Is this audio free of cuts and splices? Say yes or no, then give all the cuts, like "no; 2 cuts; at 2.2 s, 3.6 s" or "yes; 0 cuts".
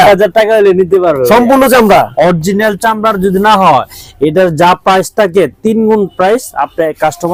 yes; 0 cuts